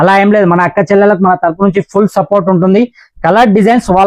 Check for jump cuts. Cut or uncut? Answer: uncut